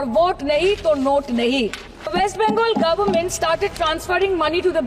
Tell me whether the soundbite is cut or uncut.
cut